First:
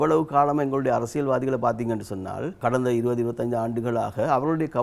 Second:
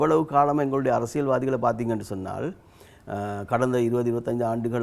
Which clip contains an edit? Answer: first; 1 cut; at 2.6 s

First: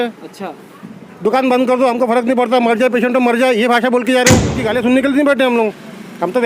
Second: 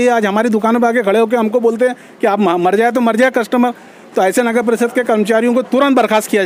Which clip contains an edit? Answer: first; 1 cut; at 4.6 s

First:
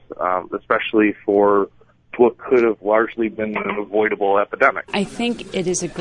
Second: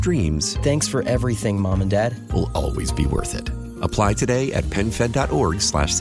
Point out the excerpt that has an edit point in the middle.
first; 1 cut; at 4.9 s

